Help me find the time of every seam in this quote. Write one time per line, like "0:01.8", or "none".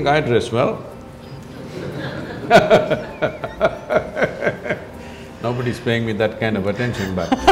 none